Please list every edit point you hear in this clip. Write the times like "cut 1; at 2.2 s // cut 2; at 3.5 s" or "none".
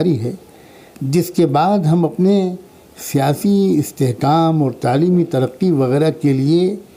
none